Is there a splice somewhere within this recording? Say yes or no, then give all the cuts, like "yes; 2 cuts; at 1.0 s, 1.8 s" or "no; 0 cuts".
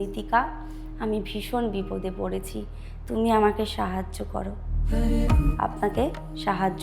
no; 0 cuts